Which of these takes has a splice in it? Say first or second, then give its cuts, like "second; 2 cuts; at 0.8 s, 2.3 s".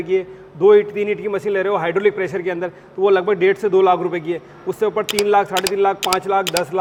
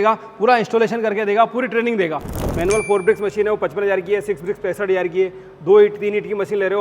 second; 1 cut; at 2.3 s